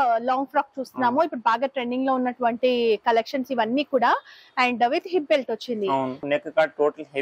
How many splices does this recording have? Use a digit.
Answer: 1